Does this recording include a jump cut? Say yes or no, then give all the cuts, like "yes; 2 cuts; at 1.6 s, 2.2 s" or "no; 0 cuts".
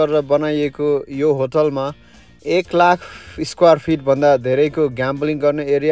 no; 0 cuts